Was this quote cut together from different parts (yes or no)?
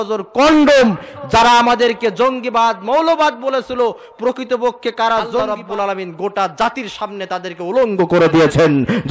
yes